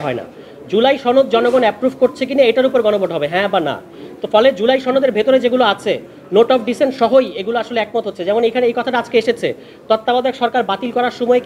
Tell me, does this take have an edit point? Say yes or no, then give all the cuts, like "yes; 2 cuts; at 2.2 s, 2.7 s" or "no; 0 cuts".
no; 0 cuts